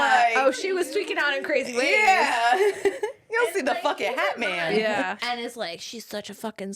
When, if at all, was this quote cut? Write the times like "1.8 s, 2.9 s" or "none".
5.2 s